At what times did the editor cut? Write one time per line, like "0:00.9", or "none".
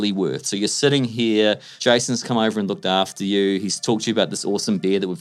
0:01.7